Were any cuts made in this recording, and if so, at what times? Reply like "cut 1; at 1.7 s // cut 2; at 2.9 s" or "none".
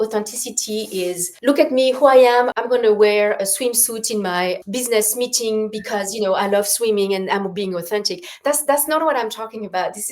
cut 1; at 1.3 s // cut 2; at 2.5 s // cut 3; at 4.6 s